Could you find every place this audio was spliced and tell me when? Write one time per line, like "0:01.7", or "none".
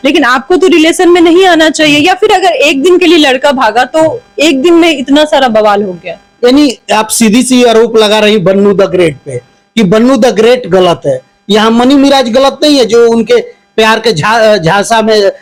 none